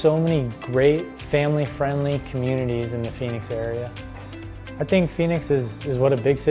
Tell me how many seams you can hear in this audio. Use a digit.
1